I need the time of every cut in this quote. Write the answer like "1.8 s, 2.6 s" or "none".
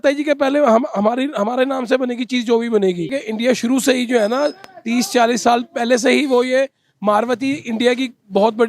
3.2 s